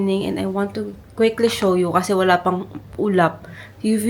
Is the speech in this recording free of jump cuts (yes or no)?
yes